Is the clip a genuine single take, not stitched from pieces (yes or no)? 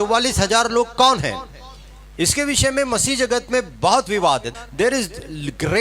no